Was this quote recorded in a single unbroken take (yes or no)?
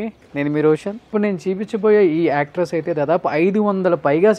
no